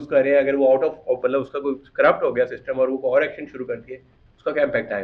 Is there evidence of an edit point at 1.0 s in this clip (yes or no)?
no